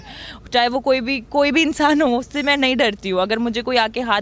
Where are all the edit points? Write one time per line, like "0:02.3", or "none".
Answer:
none